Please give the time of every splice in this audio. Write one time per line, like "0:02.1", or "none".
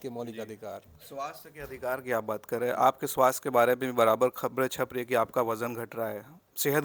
none

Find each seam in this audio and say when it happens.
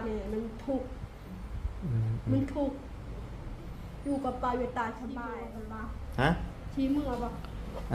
0:05.3

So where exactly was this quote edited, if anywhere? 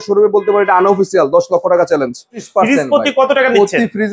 0:02.4

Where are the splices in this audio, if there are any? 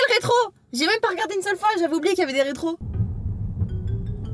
0:02.9

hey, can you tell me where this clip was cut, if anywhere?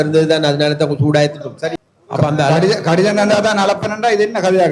0:01.7

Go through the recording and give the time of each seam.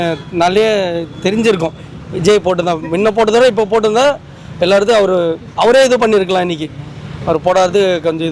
none

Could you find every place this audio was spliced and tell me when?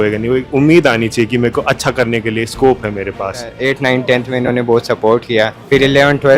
0:03.5
0:05.6

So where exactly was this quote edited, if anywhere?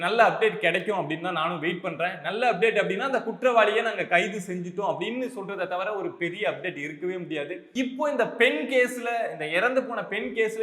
0:07.7

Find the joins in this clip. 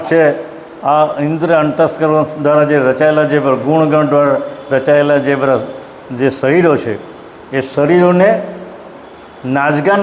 none

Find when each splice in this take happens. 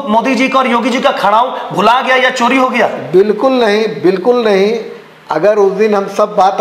none

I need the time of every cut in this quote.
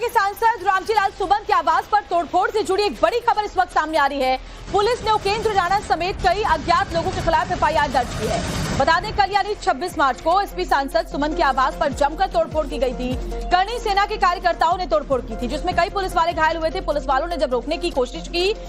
0:03.2

